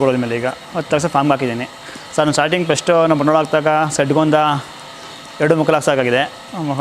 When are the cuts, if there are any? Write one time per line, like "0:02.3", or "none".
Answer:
none